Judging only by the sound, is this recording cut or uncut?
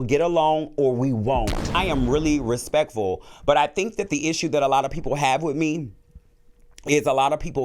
cut